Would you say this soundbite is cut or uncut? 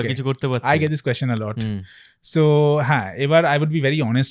uncut